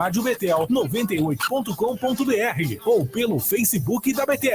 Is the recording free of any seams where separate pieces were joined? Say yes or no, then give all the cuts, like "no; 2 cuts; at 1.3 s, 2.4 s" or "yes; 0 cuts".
no; 1 cut; at 1.4 s